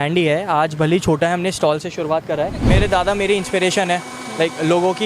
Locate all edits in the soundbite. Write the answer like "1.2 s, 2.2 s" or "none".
2.6 s